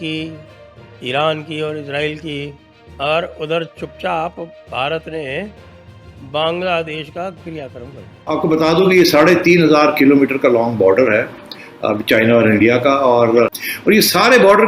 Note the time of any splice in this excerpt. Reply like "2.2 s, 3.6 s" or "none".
8.1 s, 13.6 s